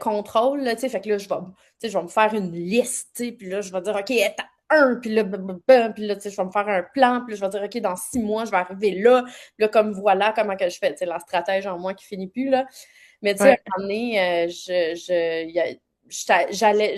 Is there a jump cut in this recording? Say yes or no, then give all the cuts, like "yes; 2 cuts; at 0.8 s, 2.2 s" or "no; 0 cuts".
no; 0 cuts